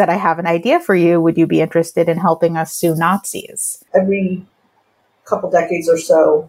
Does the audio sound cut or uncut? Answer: cut